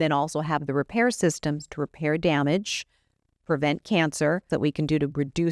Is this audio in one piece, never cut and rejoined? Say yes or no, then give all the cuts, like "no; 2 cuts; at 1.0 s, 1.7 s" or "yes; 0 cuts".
no; 1 cut; at 4.4 s